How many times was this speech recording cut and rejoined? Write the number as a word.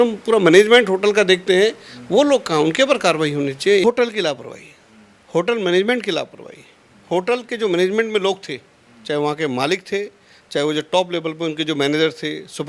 one